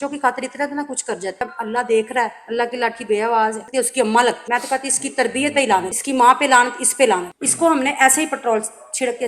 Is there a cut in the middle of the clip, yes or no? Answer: yes